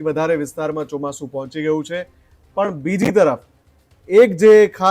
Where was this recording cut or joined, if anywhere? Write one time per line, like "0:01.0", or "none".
none

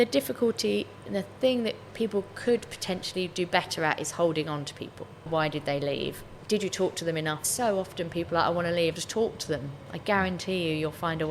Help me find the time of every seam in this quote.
0:05.3
0:06.3
0:07.5
0:09.0

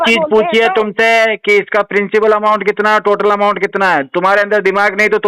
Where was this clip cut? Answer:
none

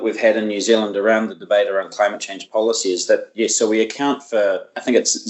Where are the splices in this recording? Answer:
none

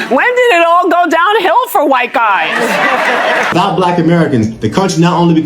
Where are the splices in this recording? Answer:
0:03.5

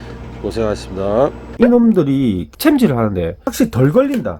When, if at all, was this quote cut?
0:01.5
0:02.4
0:03.4

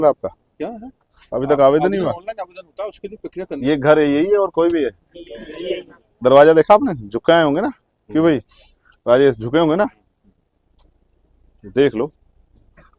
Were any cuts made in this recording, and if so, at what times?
0:03.6

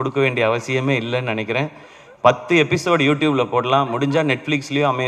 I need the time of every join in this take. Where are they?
none

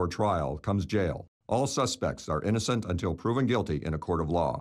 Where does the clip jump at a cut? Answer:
0:01.3

